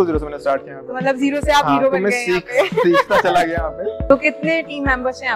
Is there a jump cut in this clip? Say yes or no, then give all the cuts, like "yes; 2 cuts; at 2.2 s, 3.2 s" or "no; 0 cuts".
yes; 1 cut; at 4.0 s